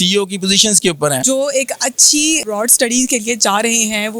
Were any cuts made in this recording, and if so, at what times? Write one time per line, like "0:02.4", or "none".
0:01.2
0:02.4